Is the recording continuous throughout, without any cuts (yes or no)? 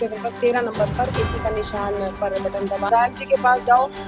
no